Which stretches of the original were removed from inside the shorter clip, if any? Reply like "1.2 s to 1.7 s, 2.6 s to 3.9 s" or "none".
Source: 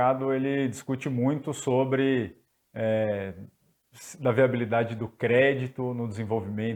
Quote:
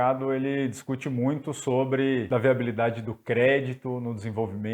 2.3 s to 4.2 s